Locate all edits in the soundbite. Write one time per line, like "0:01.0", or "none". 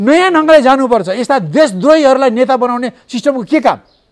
none